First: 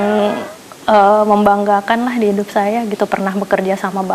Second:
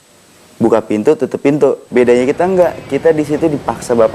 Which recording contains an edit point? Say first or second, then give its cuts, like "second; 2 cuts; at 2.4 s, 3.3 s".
second; 1 cut; at 1.8 s